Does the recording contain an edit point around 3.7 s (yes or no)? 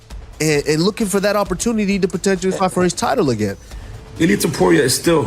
yes